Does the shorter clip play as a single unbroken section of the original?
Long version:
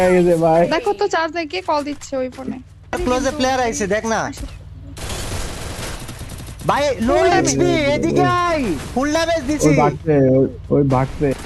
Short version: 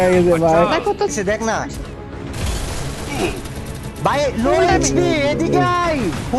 no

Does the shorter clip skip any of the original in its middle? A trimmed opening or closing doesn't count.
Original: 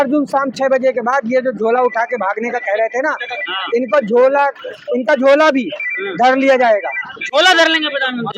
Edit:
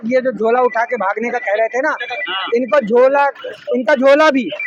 no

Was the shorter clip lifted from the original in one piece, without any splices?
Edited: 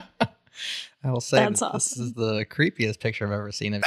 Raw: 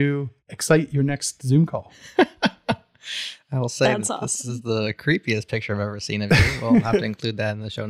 yes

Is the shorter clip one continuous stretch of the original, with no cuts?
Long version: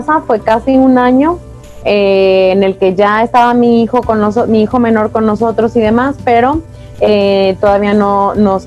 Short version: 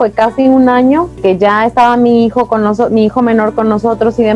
no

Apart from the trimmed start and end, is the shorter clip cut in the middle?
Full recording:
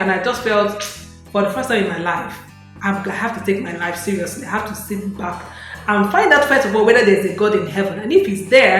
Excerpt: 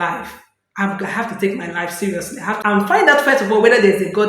yes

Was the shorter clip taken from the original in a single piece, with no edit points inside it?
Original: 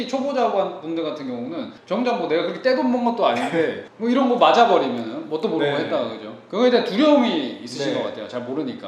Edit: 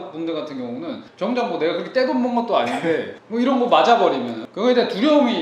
no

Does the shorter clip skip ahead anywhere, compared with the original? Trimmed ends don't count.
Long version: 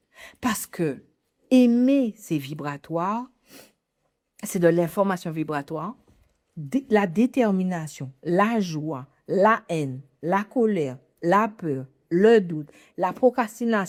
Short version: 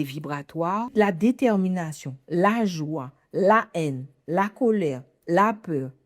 yes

